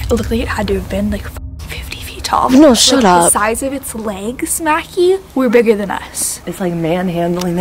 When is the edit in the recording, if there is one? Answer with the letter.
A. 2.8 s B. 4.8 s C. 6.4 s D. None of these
C